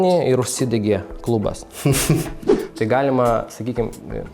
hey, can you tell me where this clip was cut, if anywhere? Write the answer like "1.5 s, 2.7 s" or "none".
2.5 s